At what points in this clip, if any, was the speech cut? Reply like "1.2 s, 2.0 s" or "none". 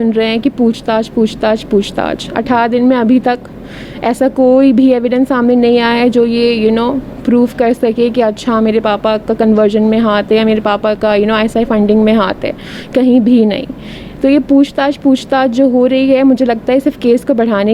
none